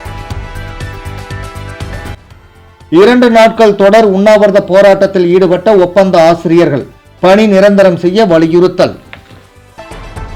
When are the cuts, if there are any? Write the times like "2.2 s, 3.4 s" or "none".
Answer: 2.3 s